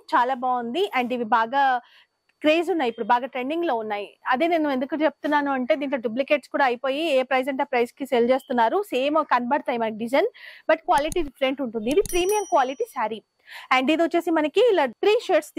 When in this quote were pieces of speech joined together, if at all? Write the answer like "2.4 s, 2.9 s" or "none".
none